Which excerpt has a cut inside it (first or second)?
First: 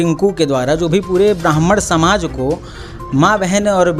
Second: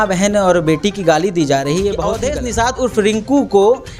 second